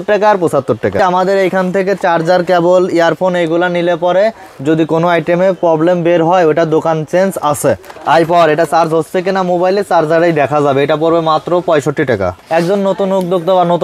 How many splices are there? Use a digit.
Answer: 3